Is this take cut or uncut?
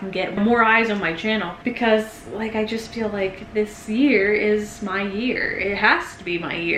uncut